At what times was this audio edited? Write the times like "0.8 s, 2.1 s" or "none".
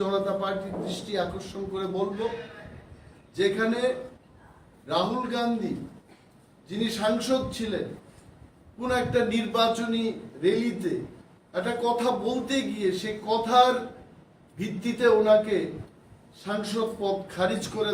12.2 s

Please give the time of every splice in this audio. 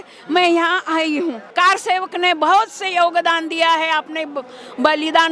1.5 s

